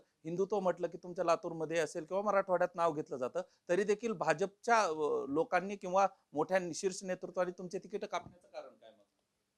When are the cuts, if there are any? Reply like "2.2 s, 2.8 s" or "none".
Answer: none